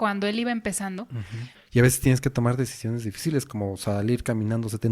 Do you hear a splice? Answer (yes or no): yes